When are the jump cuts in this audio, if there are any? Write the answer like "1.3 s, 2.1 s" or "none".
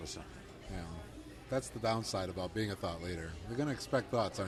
none

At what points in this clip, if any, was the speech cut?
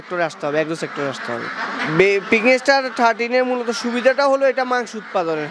1.8 s

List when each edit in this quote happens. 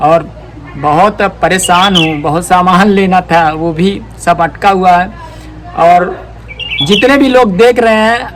none

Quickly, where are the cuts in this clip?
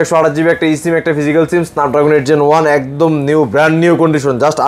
none

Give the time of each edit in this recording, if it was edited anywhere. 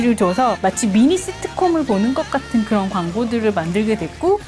none

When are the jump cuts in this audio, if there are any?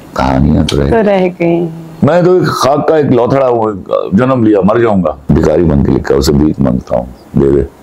1.8 s, 5.2 s

